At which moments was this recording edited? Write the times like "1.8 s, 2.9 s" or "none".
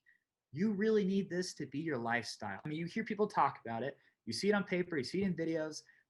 2.7 s